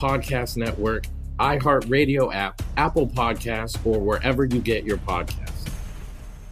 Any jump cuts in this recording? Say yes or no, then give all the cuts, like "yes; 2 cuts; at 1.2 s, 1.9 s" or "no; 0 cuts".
yes; 1 cut; at 1.0 s